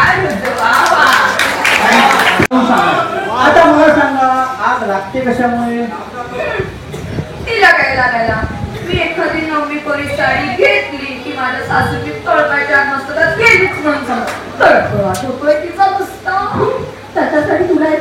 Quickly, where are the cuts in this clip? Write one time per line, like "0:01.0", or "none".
0:02.5